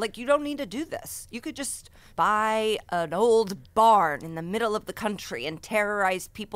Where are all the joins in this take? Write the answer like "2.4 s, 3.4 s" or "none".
2.1 s